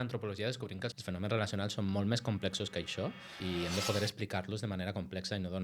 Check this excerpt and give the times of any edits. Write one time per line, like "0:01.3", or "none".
0:01.0